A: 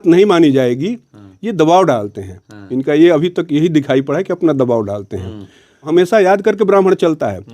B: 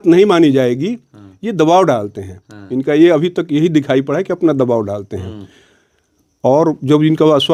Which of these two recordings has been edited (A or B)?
A